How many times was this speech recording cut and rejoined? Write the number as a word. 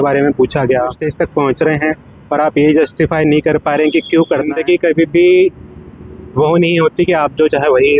two